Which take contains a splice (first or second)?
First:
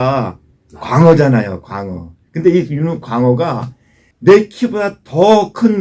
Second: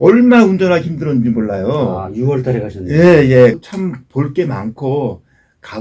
second